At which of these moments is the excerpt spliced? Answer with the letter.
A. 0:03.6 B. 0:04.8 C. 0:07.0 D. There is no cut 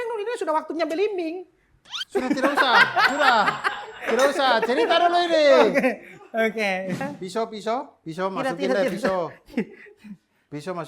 C